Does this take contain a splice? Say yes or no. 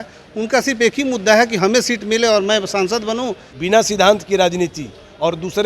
yes